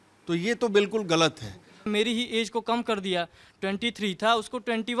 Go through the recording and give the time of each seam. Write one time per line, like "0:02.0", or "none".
0:01.8